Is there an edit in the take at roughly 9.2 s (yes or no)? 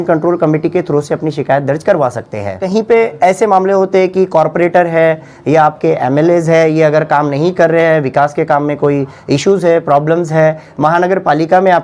no